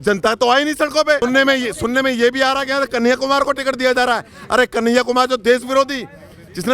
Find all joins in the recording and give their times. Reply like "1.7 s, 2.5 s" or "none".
1.2 s